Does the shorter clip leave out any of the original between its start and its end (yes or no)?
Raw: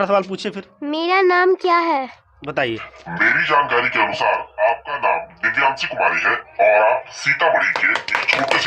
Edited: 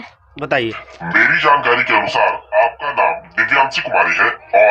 no